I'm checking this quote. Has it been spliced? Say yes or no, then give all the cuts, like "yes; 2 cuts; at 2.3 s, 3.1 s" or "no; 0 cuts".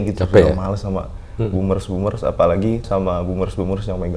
yes; 1 cut; at 2.9 s